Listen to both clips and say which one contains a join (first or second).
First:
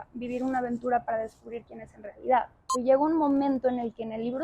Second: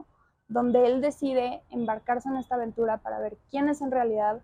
first